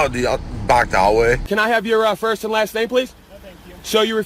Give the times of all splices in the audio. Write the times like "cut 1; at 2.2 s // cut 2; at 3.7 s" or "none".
cut 1; at 1.5 s